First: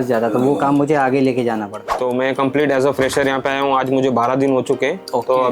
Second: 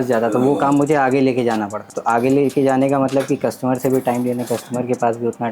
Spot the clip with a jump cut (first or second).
first